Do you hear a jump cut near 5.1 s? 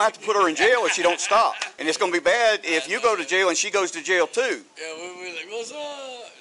no; 1 cut; at 1.7 s

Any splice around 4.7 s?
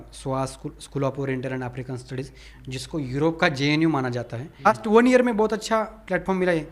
yes; 1 cut; at 4.7 s

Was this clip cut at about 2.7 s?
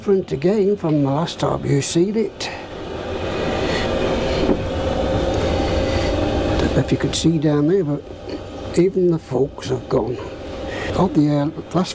no; 0 cuts

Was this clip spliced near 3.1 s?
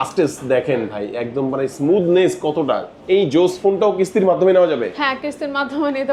no; 0 cuts

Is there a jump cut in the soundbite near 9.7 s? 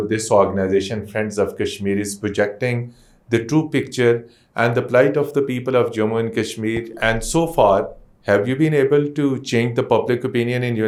no; 0 cuts

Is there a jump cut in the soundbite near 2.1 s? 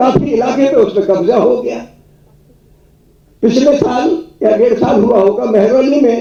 no; 0 cuts

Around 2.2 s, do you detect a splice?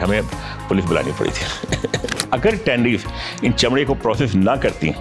yes; 1 cut; at 2.2 s

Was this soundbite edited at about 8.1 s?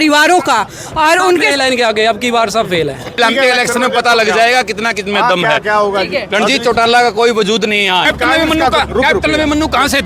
yes; 2 cuts; at 3.2 s, 8.1 s

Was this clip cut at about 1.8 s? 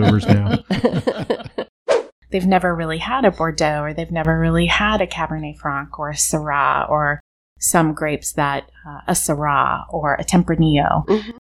yes; 1 cut; at 1.8 s

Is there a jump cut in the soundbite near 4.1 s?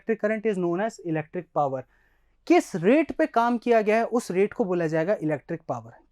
no; 0 cuts

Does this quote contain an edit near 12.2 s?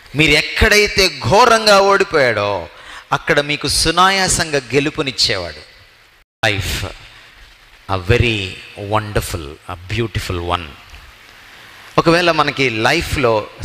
no; 1 cut; at 6.4 s

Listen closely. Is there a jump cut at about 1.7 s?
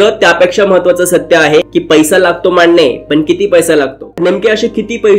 yes; 2 cuts; at 1.7 s, 4.1 s

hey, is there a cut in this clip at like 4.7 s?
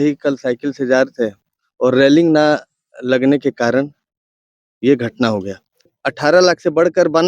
no; 1 cut; at 5.9 s

